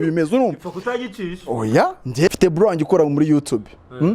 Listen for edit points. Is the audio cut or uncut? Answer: cut